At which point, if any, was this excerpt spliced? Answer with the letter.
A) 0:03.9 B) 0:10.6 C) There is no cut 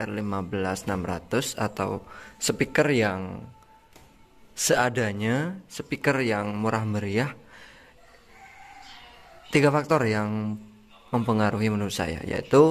C